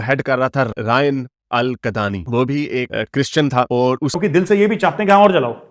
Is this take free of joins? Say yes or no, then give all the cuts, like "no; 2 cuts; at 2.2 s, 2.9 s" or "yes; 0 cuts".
no; 1 cut; at 4.1 s